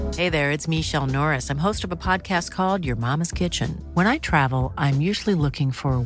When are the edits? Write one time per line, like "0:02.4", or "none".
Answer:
none